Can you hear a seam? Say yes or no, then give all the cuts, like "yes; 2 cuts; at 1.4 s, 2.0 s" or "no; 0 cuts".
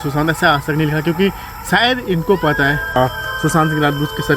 yes; 1 cut; at 3.0 s